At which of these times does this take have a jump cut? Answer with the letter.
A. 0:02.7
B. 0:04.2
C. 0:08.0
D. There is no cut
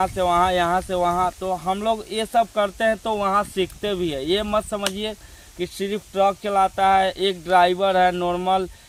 D